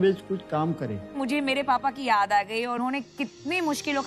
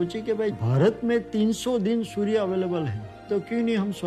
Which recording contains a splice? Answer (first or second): first